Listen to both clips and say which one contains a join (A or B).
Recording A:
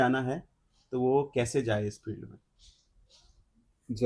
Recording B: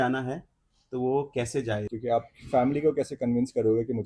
B